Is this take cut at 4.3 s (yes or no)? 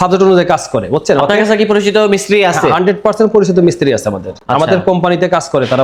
no